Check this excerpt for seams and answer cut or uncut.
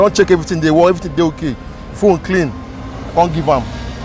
uncut